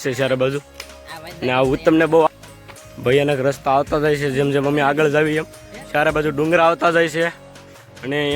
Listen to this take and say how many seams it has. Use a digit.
1